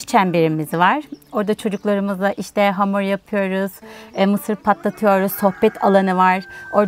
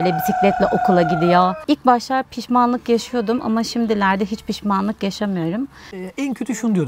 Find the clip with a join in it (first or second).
second